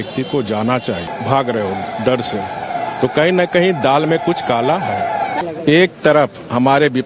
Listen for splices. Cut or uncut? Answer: cut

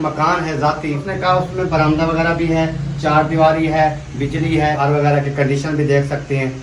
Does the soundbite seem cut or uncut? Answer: cut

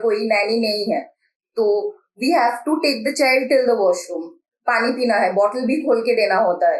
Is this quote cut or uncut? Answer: uncut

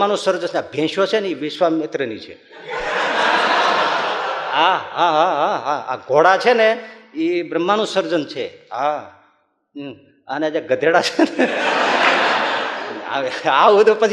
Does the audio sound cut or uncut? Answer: uncut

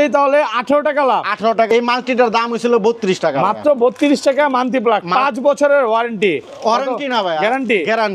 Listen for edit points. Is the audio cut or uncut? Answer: cut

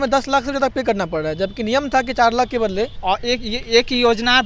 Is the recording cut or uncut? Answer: cut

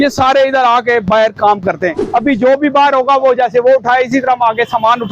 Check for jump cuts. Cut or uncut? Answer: cut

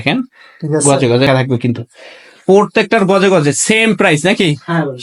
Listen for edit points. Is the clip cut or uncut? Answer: cut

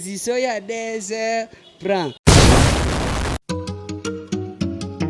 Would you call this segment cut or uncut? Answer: cut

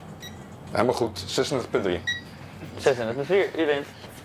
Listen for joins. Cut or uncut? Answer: uncut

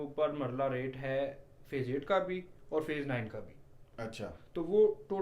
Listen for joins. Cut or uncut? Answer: uncut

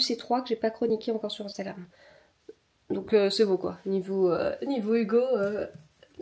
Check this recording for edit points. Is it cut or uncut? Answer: uncut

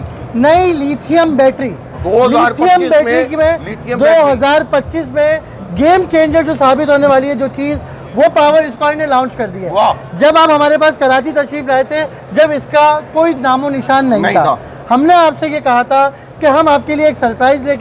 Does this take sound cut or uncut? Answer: uncut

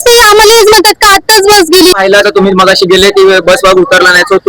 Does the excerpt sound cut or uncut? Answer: cut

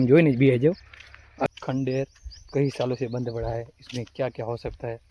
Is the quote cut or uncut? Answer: cut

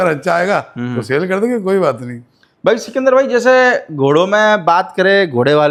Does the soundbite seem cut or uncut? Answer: uncut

